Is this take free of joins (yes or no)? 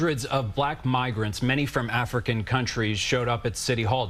yes